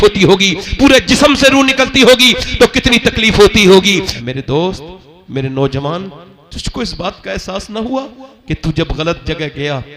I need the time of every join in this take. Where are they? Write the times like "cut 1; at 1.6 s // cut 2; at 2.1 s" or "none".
cut 1; at 4.1 s

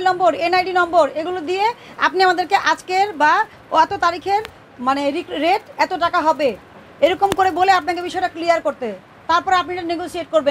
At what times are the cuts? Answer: none

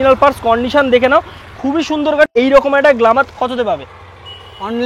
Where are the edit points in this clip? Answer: cut 1; at 2.3 s

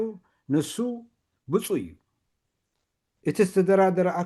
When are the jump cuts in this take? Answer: cut 1; at 2.8 s

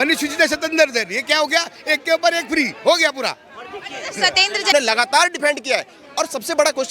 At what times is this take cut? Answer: cut 1; at 4.7 s

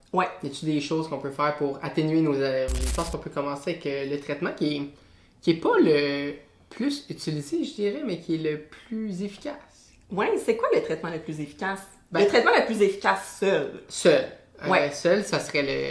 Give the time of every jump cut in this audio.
cut 1; at 2.8 s

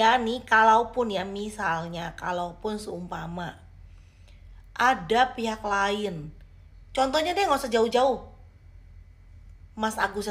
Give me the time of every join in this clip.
none

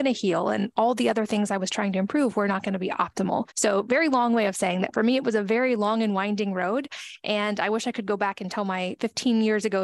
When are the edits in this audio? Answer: cut 1; at 3.5 s

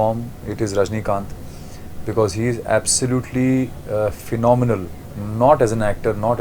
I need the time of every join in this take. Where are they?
none

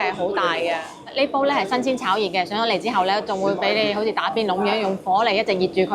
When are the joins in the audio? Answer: none

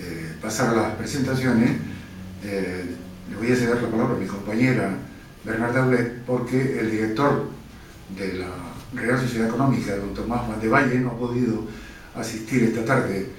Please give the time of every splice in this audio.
cut 1; at 9.2 s

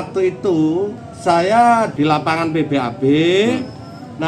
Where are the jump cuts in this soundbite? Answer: cut 1; at 1.0 s // cut 2; at 1.9 s

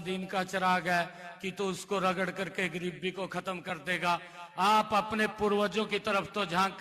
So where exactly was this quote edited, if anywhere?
none

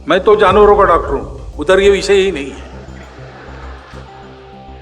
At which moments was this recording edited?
none

